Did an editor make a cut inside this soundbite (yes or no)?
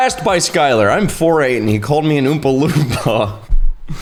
no